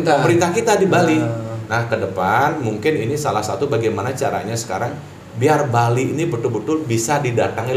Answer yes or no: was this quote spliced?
no